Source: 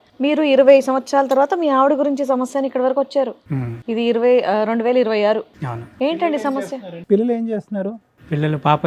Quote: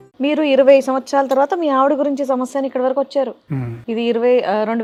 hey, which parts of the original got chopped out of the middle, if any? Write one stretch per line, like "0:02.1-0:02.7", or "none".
none